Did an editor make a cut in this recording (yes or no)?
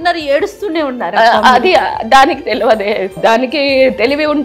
yes